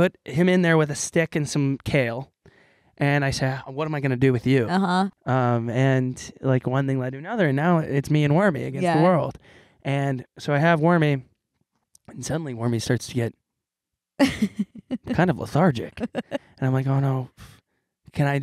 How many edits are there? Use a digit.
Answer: 1